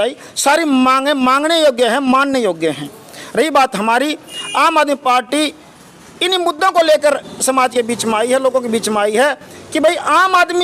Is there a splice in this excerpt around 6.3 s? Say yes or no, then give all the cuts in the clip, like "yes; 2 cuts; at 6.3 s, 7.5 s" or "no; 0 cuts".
no; 0 cuts